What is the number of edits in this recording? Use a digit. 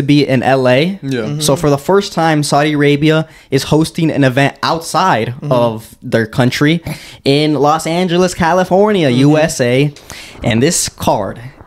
0